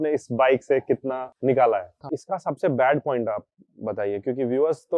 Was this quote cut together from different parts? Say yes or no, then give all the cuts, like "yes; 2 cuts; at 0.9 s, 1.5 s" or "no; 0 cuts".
yes; 2 cuts; at 1.3 s, 1.9 s